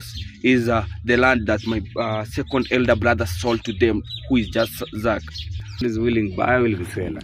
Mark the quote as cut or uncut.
cut